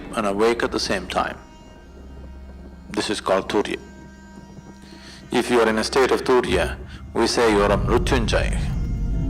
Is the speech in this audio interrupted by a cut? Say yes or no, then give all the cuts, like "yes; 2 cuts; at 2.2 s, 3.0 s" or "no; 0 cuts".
no; 0 cuts